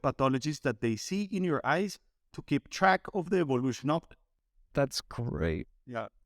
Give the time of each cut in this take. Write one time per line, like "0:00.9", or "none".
0:04.7